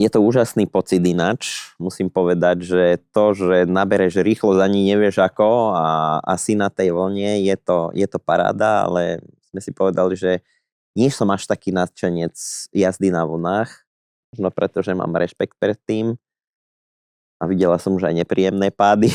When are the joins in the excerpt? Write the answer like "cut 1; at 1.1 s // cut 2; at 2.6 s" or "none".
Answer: none